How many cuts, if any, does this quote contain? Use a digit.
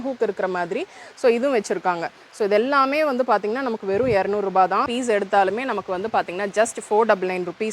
1